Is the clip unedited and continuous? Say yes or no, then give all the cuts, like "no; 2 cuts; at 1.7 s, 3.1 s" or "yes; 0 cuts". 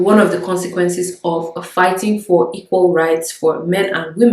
yes; 0 cuts